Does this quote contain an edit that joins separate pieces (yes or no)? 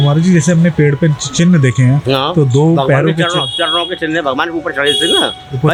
no